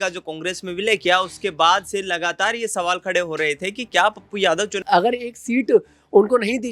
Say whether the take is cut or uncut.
cut